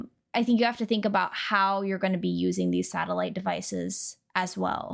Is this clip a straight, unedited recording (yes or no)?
yes